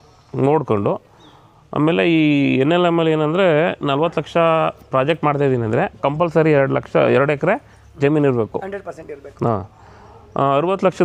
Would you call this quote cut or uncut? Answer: uncut